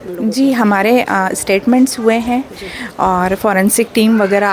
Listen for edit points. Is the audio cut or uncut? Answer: uncut